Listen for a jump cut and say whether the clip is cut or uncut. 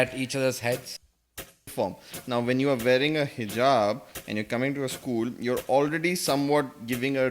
cut